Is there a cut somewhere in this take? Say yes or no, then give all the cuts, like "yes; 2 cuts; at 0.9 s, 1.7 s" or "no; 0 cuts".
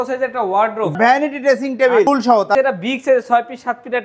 yes; 2 cuts; at 0.9 s, 2.5 s